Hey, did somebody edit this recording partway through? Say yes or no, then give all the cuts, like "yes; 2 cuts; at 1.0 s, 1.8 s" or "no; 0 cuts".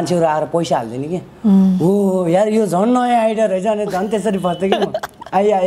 no; 0 cuts